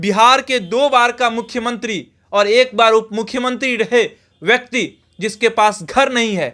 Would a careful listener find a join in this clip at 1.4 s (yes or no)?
no